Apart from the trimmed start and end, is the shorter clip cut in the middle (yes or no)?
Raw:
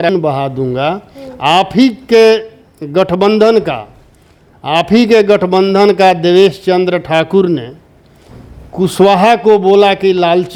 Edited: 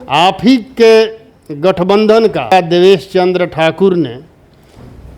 yes